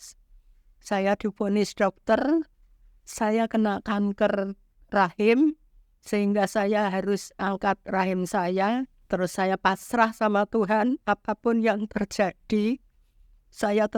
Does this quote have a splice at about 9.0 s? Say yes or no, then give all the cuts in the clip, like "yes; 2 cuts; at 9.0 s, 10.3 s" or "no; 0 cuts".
yes; 1 cut; at 9.0 s